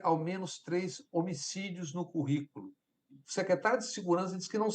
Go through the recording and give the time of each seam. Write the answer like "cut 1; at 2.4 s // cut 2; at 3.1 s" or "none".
cut 1; at 3.2 s